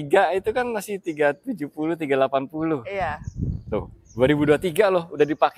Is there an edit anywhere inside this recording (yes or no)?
no